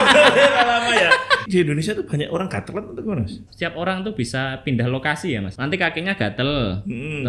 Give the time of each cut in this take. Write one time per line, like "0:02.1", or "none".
0:01.4
0:03.4
0:05.5